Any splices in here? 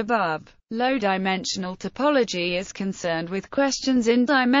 yes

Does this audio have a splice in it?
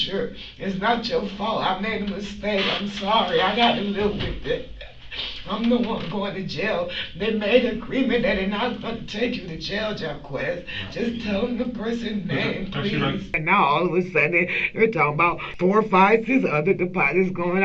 yes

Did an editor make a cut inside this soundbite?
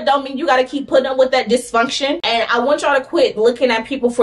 yes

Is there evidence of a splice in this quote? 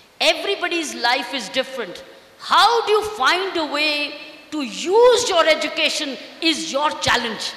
no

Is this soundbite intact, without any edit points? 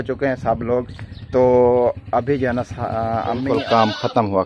no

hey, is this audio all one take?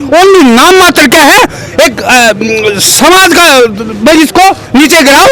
yes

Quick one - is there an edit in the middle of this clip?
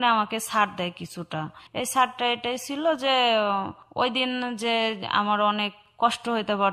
yes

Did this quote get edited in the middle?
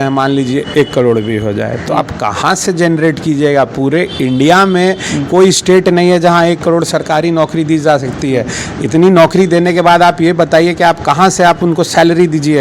no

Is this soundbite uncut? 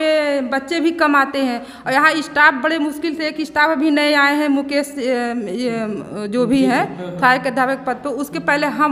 yes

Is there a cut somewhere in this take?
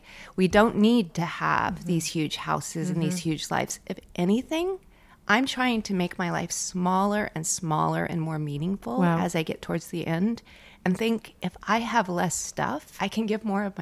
yes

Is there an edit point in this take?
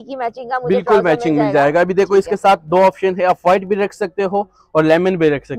no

